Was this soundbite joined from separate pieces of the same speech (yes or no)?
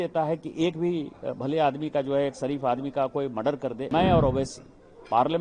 yes